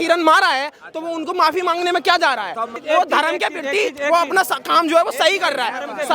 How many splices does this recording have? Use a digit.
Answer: 1